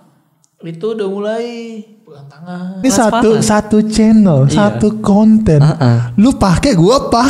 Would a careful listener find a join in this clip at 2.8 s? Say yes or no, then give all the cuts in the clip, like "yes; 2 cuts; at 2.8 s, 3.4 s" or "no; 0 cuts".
yes; 1 cut; at 2.8 s